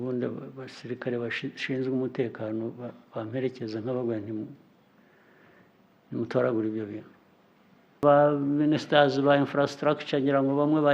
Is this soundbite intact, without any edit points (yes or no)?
no